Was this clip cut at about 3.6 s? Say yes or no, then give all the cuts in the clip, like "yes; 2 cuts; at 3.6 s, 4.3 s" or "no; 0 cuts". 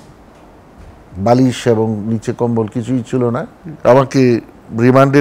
yes; 1 cut; at 3.6 s